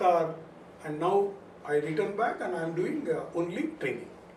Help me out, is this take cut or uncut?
uncut